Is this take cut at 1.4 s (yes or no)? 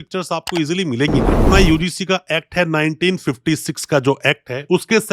yes